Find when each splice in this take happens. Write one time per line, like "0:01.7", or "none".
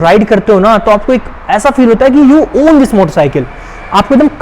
none